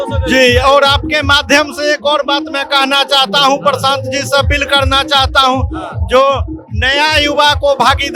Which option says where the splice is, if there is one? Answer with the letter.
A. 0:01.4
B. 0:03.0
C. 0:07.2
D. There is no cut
D